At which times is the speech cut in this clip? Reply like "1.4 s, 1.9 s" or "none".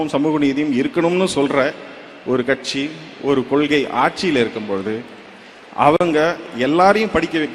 none